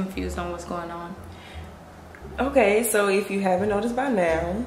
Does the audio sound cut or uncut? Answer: uncut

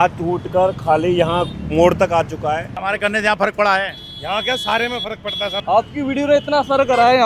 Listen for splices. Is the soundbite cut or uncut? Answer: cut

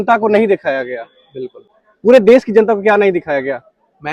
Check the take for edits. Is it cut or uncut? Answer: uncut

